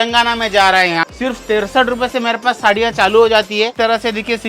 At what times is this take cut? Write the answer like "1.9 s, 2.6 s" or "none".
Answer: 1.1 s, 3.7 s